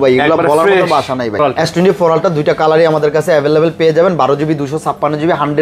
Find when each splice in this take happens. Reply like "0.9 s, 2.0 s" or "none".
1.4 s